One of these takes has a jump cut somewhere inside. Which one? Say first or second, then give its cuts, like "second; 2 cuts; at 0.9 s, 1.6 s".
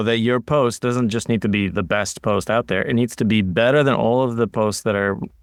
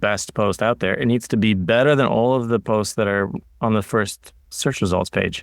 second; 1 cut; at 4.5 s